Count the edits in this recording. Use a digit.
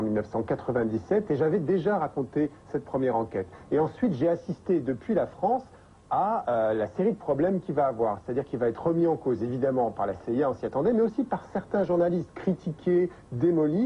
1